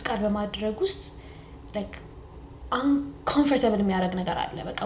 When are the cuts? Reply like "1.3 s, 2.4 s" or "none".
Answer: none

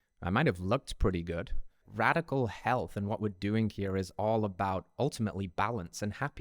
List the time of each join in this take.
1.8 s

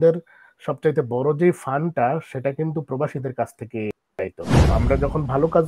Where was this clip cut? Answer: 4.7 s

